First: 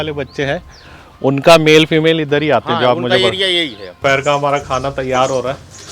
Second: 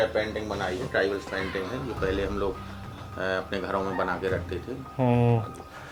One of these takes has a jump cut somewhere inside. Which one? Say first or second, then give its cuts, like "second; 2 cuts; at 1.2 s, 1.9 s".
first; 1 cut; at 4.0 s